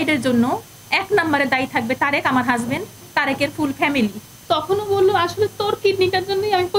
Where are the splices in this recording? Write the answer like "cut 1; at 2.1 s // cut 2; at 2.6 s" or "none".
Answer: cut 1; at 4.3 s